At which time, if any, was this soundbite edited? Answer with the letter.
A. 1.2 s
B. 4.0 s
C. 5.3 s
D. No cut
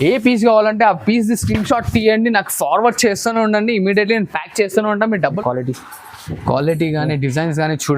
C